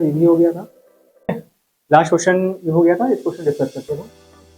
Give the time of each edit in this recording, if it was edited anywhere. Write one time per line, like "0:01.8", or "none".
0:01.3